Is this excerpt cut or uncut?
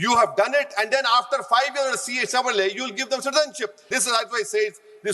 cut